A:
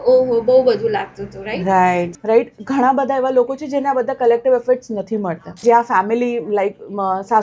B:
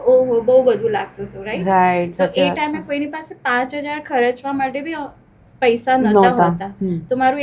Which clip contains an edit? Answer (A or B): A